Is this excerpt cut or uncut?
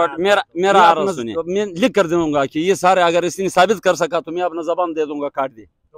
cut